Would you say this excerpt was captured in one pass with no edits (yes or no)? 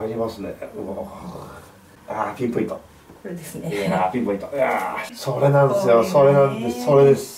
no